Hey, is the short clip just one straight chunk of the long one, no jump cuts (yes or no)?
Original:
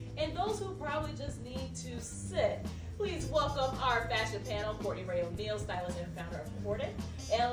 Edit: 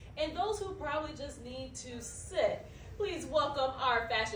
yes